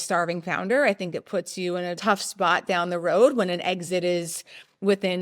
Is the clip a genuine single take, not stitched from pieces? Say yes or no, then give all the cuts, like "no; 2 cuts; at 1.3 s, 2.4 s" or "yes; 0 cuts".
no; 1 cut; at 2.0 s